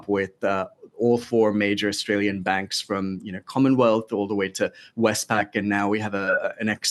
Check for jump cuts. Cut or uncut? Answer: uncut